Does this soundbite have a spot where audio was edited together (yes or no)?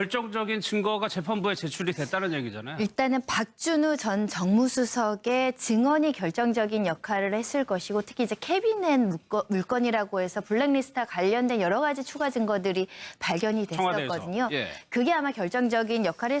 yes